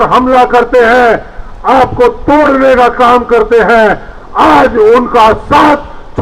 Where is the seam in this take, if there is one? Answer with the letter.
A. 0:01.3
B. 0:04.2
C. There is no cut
C